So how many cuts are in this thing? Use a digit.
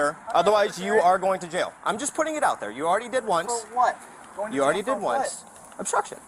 0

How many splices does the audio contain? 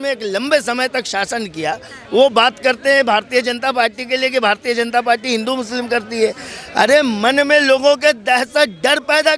0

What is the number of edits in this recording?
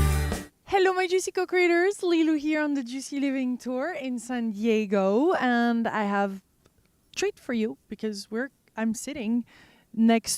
1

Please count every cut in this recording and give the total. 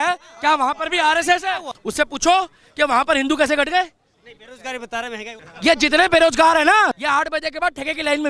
3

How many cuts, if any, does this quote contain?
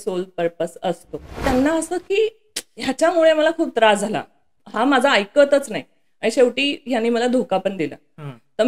1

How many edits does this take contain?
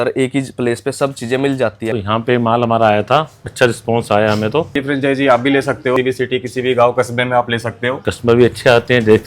5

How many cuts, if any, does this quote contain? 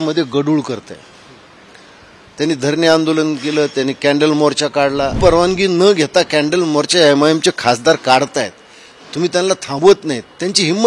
1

